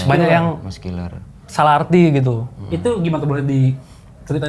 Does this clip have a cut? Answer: no; 0 cuts

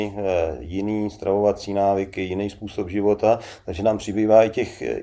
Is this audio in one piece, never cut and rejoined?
yes; 0 cuts

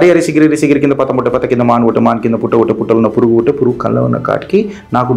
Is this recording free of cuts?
yes; 0 cuts

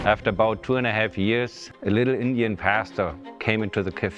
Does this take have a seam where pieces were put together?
yes; 1 cut; at 1.7 s

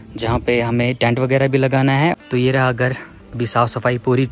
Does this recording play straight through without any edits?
no; 1 cut; at 2.1 s

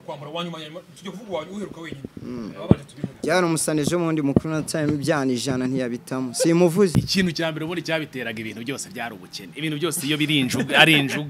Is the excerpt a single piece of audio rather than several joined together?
no; 1 cut; at 7.0 s

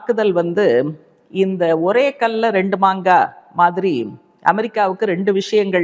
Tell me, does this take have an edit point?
no; 0 cuts

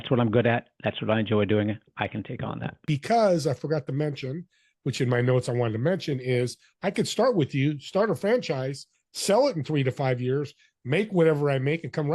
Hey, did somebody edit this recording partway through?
yes; 1 cut; at 2.9 s

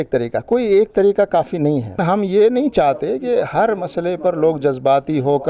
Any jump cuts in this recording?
yes; 1 cut; at 2.0 s

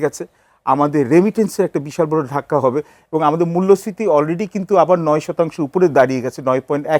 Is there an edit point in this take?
no; 0 cuts

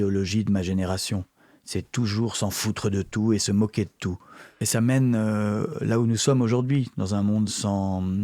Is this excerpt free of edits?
no; 1 cut; at 4.6 s

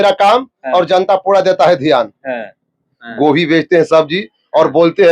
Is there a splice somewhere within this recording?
yes; 1 cut; at 3.0 s

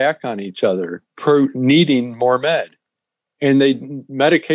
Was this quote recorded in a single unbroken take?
no; 1 cut; at 1.1 s

